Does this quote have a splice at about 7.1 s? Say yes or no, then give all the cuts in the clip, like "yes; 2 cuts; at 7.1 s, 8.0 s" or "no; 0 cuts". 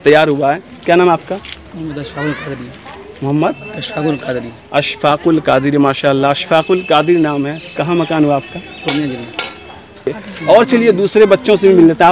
no; 1 cut; at 10.2 s